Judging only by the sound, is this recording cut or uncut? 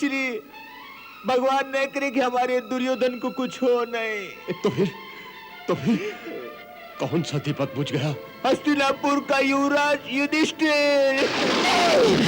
cut